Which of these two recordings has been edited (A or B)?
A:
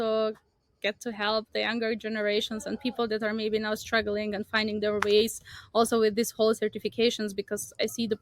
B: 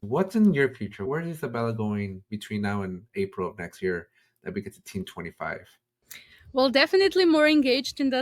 B